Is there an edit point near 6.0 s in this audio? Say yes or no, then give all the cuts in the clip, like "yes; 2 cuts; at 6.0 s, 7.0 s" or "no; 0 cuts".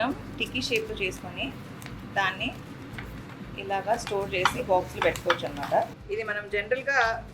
yes; 1 cut; at 6.0 s